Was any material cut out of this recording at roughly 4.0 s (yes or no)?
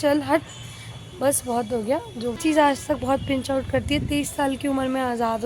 no